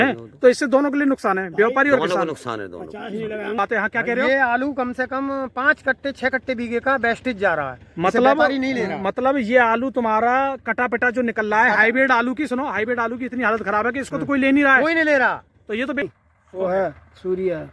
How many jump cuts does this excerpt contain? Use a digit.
2